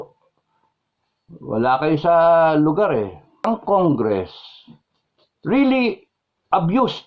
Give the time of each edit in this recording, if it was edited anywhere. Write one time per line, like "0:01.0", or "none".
0:03.4